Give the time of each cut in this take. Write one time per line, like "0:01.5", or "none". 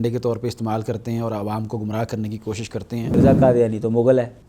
0:03.2